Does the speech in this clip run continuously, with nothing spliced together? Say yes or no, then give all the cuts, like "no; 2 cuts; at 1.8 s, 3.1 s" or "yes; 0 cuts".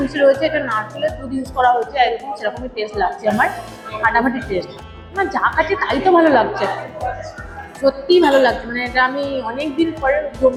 yes; 0 cuts